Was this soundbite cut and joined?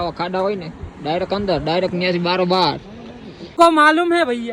yes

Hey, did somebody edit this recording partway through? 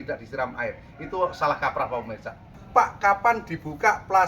yes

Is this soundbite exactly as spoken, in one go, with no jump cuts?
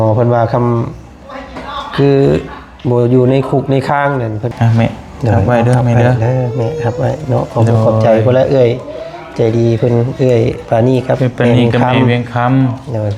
no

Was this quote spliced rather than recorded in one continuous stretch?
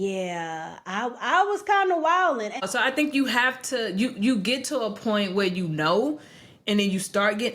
yes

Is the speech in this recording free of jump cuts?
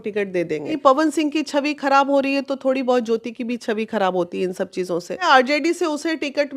no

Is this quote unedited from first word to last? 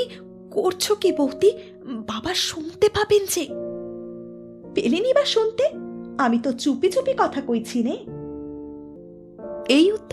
no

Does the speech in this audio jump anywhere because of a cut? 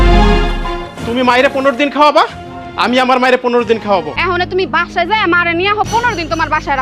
yes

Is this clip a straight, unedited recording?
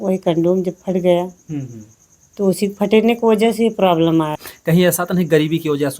no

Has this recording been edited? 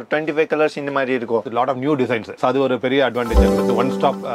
yes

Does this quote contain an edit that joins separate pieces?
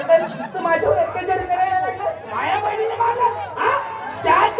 yes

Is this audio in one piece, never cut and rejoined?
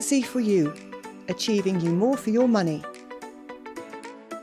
no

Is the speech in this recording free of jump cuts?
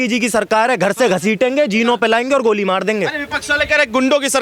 yes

